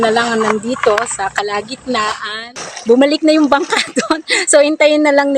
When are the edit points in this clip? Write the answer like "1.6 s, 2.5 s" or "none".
2.4 s